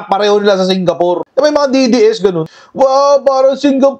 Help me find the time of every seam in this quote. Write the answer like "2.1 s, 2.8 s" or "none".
none